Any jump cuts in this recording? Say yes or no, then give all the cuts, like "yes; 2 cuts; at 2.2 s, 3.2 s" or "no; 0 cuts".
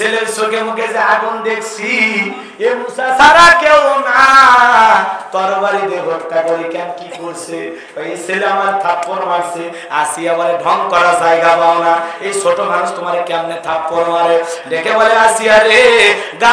no; 0 cuts